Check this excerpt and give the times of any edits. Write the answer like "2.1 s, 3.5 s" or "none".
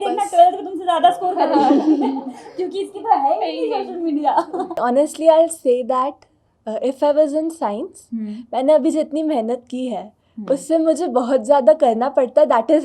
4.8 s